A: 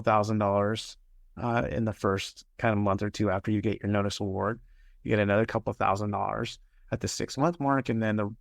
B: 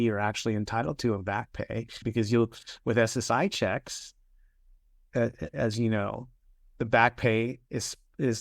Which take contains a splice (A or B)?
B